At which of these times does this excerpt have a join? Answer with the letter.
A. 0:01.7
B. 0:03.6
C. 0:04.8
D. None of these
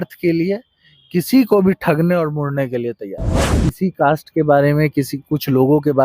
B